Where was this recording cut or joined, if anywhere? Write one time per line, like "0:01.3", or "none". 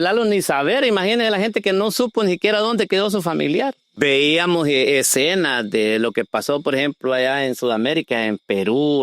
0:03.9